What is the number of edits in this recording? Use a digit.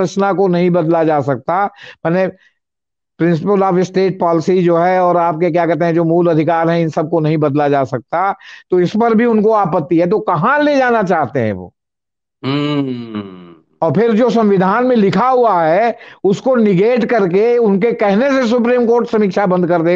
0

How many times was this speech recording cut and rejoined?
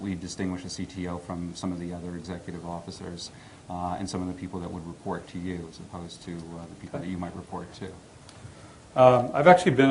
0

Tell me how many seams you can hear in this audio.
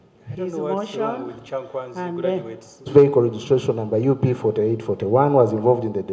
1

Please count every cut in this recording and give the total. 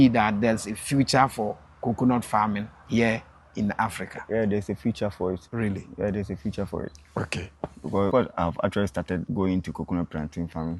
1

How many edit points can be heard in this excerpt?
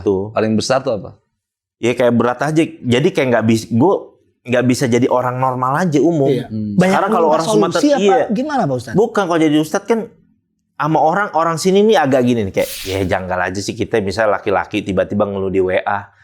1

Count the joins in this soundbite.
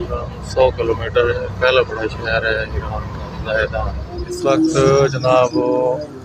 1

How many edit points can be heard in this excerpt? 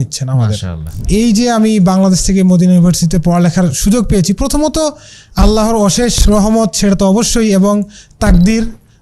1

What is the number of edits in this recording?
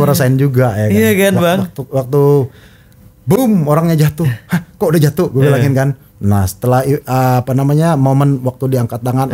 0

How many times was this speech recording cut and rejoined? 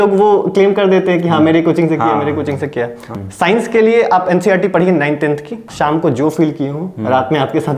2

